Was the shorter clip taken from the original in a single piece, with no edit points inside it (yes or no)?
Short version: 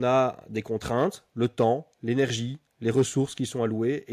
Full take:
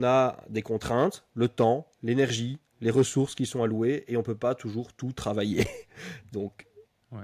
yes